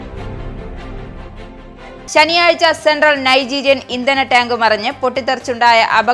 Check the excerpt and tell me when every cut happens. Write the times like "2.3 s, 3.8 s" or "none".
2.0 s